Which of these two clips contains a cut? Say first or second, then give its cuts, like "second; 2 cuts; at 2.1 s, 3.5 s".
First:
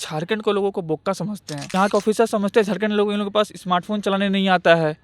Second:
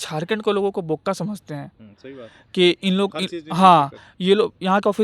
first; 1 cut; at 1.6 s